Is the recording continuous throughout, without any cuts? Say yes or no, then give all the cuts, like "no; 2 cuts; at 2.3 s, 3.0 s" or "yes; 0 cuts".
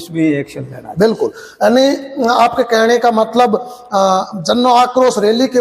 yes; 0 cuts